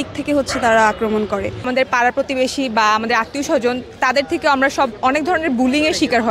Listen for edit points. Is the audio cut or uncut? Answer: cut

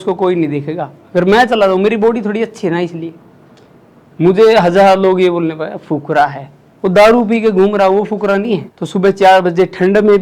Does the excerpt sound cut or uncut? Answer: cut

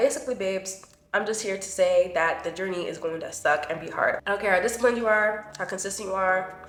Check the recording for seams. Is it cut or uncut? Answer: uncut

